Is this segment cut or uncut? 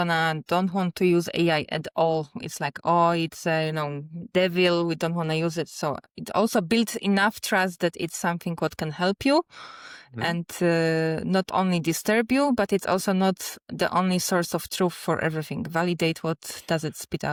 uncut